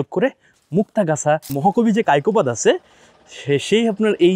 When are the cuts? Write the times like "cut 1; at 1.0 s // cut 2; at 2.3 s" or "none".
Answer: cut 1; at 1.5 s